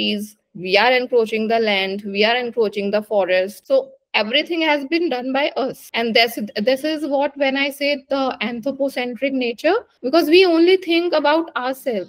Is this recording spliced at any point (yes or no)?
no